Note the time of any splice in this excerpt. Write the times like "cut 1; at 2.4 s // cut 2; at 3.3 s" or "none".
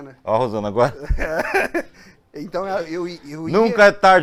none